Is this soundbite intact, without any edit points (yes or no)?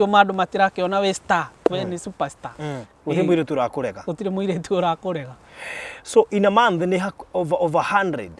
yes